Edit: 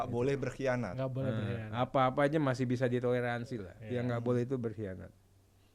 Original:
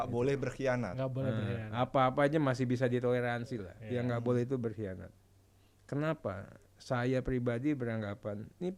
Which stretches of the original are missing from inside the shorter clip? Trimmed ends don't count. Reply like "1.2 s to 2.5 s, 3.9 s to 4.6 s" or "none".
none